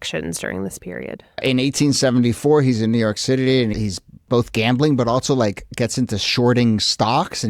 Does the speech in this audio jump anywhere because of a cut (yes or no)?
yes